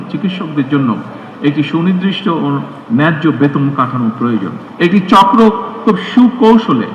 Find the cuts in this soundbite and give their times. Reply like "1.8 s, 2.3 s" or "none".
4.6 s